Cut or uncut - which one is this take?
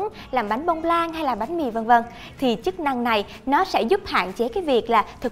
uncut